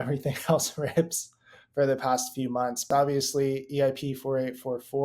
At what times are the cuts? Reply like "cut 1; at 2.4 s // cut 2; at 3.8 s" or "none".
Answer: cut 1; at 2.9 s